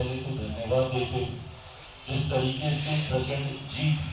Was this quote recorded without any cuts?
yes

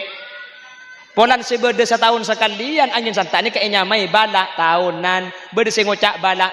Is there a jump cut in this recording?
no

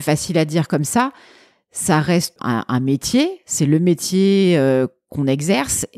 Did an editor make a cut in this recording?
yes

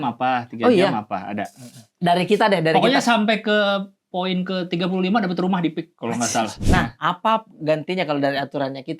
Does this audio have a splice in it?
yes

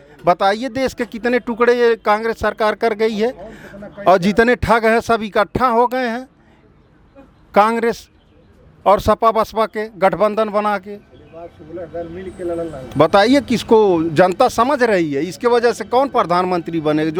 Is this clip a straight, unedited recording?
yes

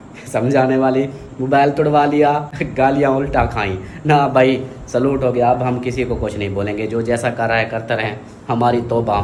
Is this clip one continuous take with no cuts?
yes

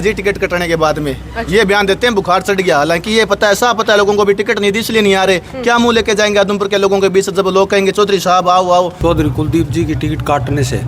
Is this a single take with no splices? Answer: no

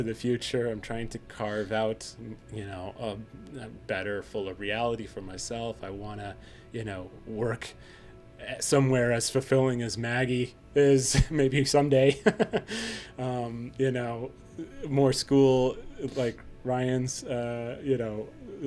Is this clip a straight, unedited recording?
yes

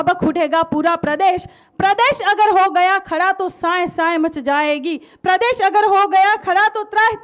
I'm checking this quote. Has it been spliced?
no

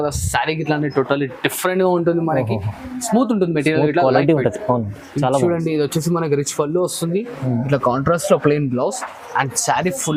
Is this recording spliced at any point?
no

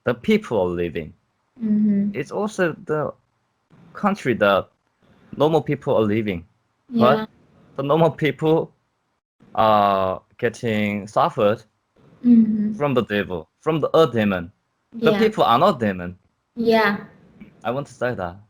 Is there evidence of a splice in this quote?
no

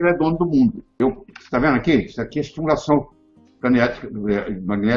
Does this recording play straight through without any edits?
no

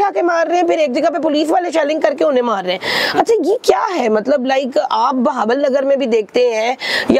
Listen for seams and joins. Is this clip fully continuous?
yes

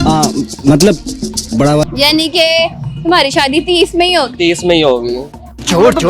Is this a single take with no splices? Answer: no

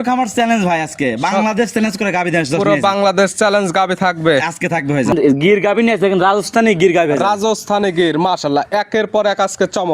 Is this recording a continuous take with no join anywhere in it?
no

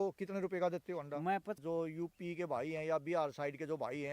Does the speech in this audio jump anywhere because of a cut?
yes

